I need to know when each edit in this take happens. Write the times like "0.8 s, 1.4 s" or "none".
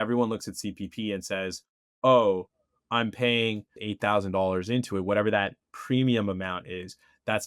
3.8 s